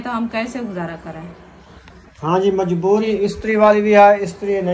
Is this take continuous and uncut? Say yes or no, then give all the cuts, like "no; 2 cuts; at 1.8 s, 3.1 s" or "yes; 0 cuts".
yes; 0 cuts